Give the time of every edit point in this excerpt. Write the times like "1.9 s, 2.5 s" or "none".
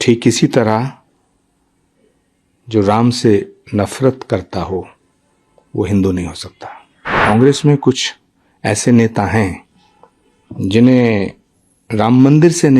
7.1 s